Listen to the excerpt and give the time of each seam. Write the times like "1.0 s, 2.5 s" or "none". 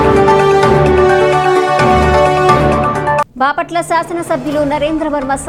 none